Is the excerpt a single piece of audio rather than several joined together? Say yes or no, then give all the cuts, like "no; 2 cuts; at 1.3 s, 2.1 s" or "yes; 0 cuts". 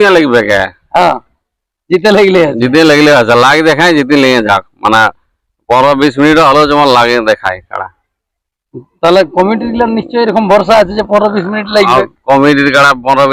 yes; 0 cuts